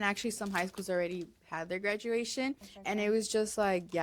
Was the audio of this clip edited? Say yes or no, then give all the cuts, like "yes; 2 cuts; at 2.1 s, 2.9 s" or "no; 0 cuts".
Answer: yes; 1 cut; at 2.7 s